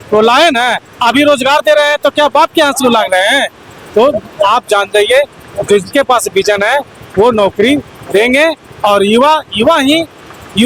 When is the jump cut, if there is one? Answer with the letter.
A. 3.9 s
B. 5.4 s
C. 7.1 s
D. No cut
D